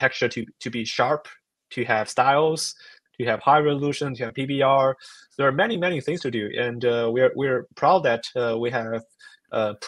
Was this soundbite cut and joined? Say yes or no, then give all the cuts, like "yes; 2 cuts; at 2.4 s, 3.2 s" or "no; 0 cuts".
no; 0 cuts